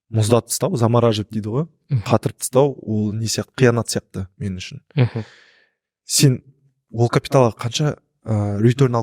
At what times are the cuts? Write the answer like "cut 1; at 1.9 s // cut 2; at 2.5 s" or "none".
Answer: none